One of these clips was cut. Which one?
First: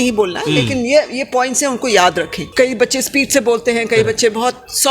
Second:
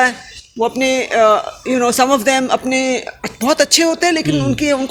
first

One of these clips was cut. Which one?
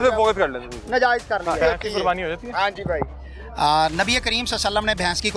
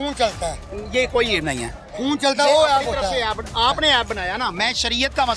first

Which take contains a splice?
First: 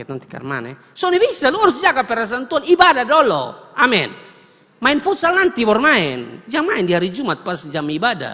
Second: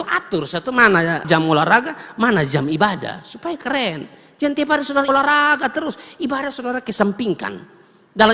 second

